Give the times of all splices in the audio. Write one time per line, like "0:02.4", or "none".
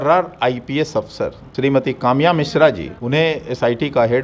0:01.4
0:02.9